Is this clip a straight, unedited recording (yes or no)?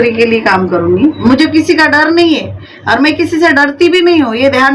no